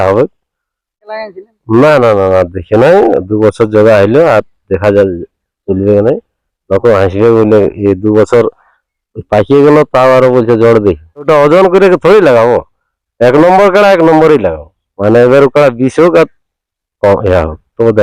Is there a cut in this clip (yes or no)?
yes